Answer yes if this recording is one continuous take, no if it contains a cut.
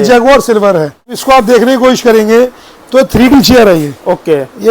no